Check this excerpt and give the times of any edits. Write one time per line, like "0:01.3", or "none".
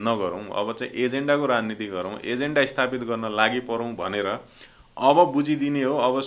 none